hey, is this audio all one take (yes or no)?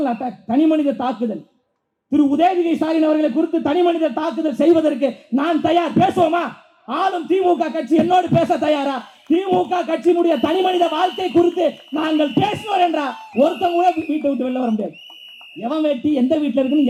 yes